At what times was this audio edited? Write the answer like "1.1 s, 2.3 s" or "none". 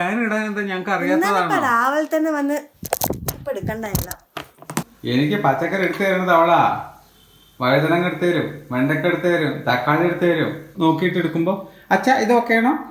4.9 s, 10.7 s